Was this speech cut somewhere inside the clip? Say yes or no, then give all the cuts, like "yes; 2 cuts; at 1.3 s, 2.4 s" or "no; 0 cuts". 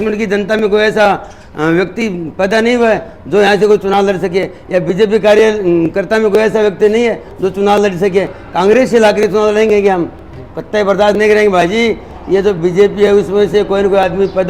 no; 0 cuts